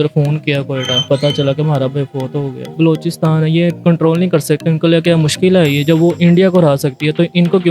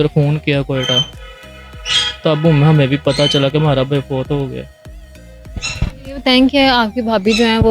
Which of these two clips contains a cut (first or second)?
first